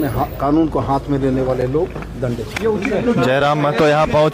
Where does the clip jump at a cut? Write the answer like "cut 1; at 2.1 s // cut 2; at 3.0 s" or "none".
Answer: none